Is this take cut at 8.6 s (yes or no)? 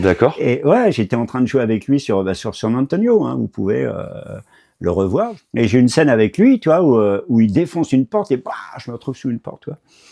no